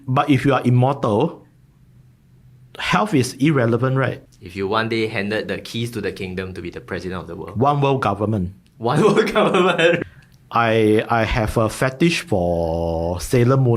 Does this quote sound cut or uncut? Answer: cut